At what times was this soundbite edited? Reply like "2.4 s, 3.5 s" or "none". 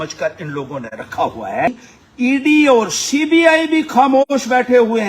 1.8 s